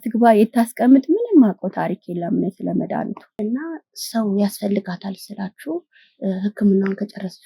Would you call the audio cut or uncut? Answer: cut